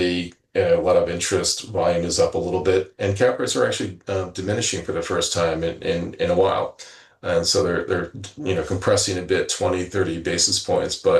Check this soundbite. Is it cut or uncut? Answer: uncut